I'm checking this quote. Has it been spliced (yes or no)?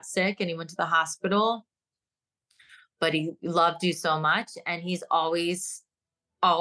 no